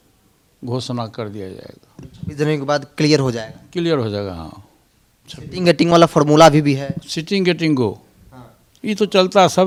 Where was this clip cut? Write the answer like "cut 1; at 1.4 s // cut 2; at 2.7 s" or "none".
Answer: none